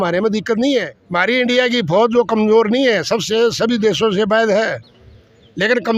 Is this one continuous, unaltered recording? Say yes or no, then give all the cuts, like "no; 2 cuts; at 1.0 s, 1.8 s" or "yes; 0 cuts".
no; 1 cut; at 1.0 s